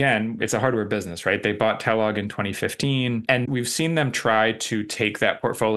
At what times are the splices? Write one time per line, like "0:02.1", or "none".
0:03.4